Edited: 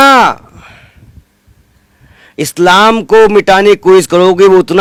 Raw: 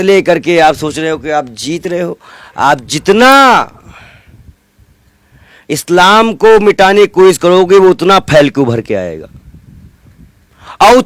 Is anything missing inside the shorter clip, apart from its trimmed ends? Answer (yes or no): no